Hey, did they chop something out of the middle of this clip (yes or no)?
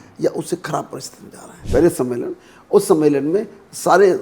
yes